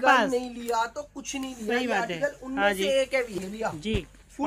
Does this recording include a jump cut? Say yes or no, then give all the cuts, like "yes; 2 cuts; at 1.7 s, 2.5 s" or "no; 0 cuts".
yes; 1 cut; at 3.4 s